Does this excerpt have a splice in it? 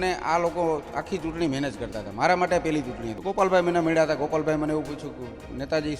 yes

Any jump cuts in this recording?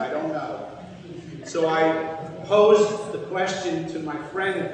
no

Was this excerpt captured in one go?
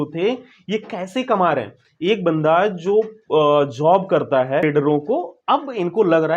no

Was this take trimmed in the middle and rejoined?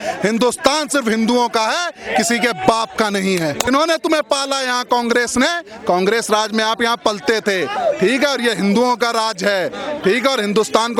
yes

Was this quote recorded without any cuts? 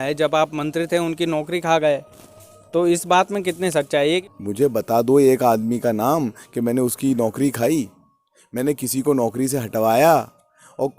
no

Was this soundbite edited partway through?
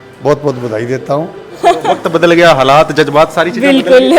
yes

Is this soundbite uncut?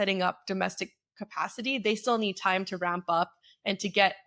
yes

